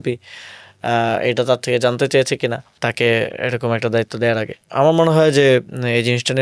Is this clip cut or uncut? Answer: uncut